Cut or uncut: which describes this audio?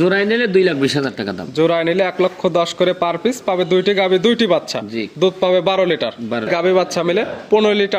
cut